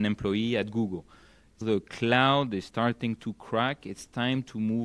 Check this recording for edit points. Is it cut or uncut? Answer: cut